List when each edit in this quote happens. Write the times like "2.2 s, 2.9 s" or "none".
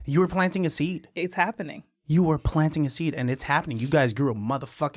none